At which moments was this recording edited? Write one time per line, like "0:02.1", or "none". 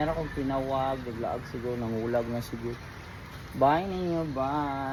none

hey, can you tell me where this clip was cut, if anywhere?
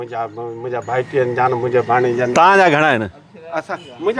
none

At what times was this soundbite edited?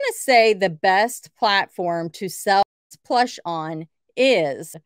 0:02.6

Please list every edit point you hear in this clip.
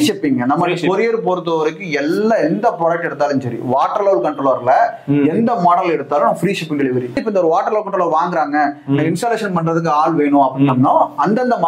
0:07.2

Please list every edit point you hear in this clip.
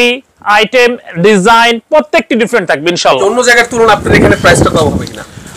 0:03.2

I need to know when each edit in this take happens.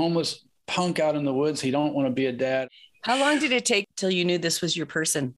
0:02.6
0:03.9

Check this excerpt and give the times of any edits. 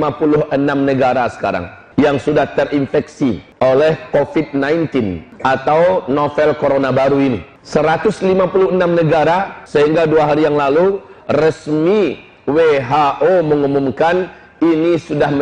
0:01.8
0:03.5
0:05.2
0:07.5
0:09.5

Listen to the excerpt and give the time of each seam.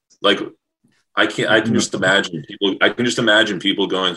none

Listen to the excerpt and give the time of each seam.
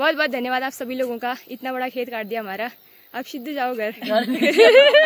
none

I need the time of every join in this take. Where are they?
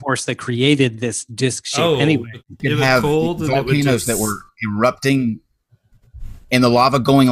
0:02.6

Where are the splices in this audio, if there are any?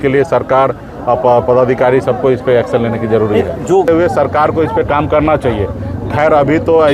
0:03.9

